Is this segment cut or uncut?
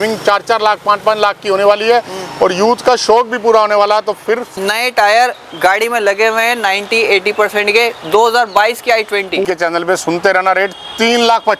cut